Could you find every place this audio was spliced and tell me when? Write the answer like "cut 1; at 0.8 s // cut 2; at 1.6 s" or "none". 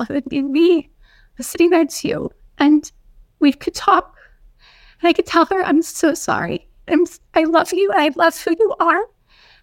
none